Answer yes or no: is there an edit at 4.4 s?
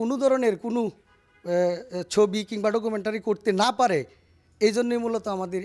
no